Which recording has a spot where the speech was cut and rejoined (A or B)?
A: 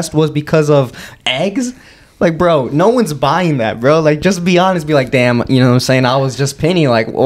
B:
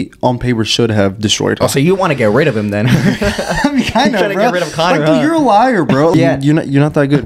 B